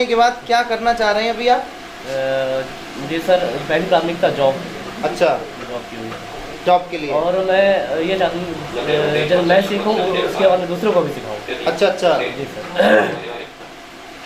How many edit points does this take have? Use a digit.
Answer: 0